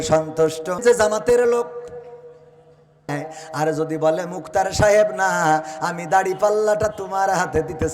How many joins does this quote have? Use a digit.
2